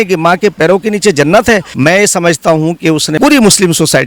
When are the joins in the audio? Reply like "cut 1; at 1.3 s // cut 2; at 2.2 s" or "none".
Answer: cut 1; at 1.7 s // cut 2; at 3.1 s